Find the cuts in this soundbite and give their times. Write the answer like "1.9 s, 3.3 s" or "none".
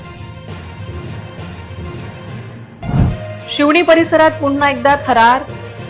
2.1 s